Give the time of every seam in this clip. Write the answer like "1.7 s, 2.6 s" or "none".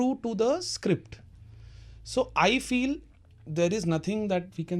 none

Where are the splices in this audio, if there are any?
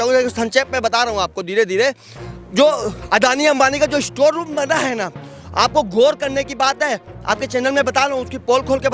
none

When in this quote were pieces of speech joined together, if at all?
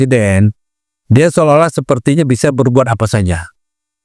none

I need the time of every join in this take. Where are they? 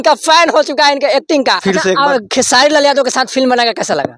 1.6 s

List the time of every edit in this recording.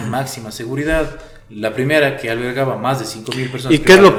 none

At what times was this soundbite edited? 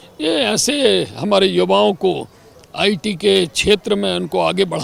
none

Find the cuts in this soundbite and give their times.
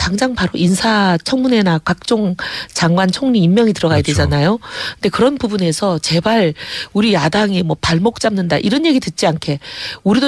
2.7 s

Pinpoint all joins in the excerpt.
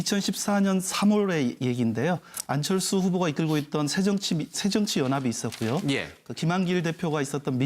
5.8 s

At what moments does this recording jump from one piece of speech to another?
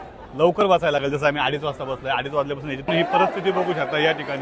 2.9 s

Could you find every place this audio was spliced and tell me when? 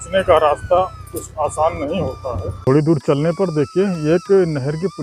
2.5 s

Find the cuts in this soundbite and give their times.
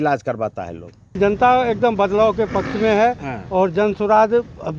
1.2 s

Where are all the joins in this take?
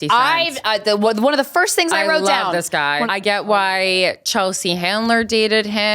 3.0 s

